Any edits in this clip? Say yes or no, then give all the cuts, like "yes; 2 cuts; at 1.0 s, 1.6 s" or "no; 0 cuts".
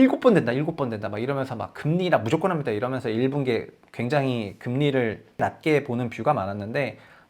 yes; 1 cut; at 5.4 s